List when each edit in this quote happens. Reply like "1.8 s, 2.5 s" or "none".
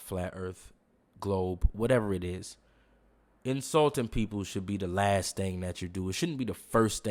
none